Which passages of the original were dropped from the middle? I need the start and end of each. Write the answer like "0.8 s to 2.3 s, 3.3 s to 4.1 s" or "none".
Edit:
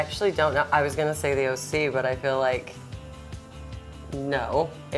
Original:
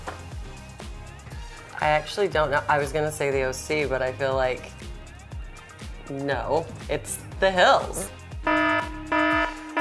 none